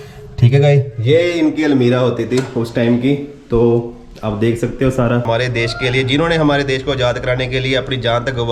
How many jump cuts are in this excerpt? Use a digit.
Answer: 1